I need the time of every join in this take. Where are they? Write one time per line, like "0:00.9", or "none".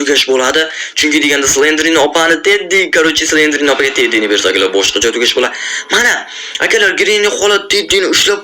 none